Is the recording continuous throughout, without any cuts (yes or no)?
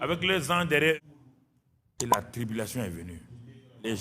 no